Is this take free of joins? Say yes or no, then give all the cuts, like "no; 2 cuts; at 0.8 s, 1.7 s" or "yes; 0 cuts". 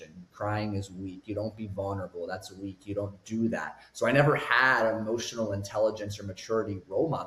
yes; 0 cuts